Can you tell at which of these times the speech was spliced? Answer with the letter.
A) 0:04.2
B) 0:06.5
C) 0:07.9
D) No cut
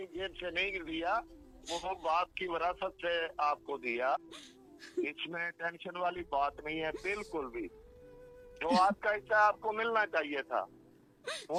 D